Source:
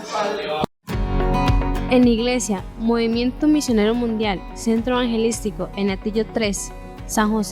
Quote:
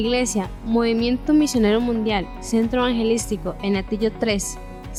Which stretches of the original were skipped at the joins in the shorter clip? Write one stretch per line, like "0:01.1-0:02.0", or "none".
none